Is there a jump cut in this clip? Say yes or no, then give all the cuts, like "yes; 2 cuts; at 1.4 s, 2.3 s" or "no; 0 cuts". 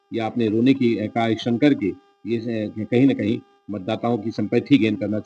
no; 0 cuts